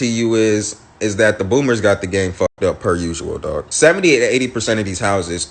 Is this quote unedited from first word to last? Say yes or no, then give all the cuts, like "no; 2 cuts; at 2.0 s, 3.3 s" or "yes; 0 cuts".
no; 1 cut; at 3.4 s